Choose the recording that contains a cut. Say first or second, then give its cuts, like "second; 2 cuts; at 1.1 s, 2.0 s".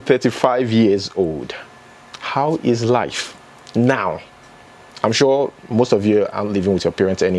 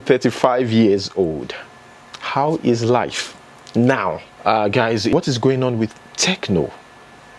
second; 1 cut; at 4.3 s